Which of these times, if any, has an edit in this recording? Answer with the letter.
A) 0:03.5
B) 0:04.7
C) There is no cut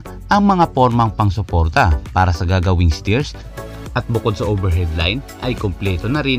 A